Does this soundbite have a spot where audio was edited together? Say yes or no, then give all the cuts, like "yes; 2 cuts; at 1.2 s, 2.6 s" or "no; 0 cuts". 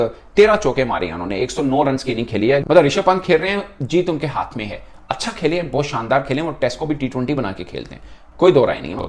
no; 0 cuts